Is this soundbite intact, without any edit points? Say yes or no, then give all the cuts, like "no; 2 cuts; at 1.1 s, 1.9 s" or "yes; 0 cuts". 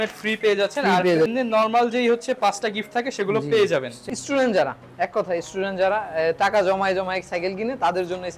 no; 2 cuts; at 1.3 s, 4.0 s